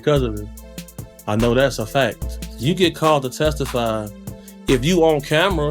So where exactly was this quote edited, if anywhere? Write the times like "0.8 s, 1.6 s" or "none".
2.5 s